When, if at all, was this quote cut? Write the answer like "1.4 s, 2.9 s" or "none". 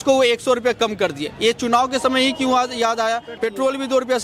3.3 s